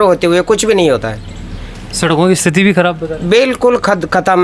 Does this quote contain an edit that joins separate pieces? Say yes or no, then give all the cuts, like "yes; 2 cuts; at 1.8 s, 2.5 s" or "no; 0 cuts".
no; 0 cuts